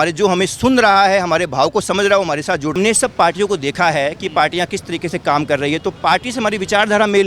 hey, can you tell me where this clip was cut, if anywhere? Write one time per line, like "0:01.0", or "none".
0:02.7